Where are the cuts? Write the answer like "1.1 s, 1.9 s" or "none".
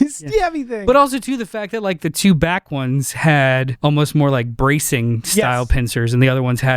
3.7 s